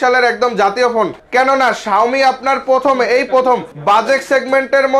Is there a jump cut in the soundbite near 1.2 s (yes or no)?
no